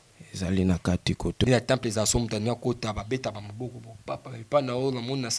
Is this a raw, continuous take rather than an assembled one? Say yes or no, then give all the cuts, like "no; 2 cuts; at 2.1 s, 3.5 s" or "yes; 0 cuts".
no; 1 cut; at 1.4 s